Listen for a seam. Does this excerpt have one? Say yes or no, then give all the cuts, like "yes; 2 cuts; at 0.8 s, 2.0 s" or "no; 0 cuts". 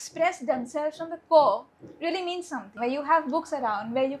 yes; 1 cut; at 2.7 s